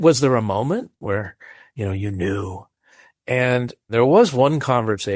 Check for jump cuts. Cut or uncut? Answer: cut